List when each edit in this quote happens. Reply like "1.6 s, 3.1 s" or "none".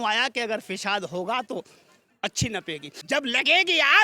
2.9 s